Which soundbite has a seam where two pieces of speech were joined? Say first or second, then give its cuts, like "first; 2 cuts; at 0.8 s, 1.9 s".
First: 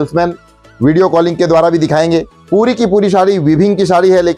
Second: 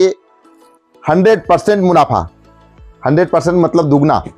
first; 1 cut; at 2.4 s